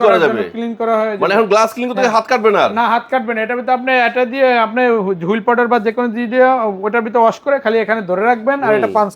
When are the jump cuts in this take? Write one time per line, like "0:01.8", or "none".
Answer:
none